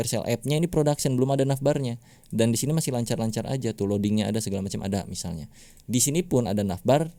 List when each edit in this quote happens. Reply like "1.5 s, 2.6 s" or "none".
none